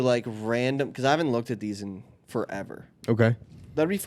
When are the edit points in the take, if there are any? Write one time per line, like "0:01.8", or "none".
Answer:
none

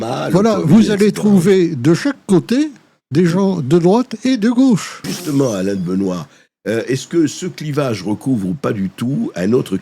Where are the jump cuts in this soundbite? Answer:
0:05.1

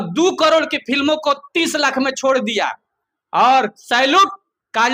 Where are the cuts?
none

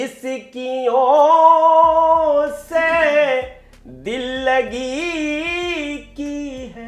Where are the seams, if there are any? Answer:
none

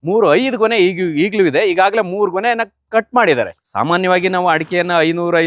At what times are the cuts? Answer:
0:03.6

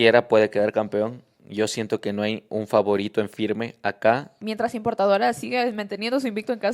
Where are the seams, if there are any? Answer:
0:04.4

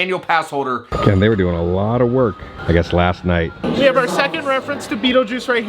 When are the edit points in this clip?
0:00.9
0:03.6

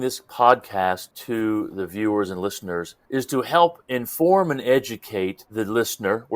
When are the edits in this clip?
0:01.1

